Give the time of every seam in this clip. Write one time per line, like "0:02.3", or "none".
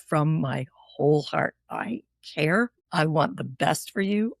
0:02.8